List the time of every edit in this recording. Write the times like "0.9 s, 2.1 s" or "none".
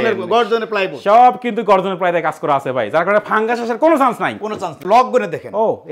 4.8 s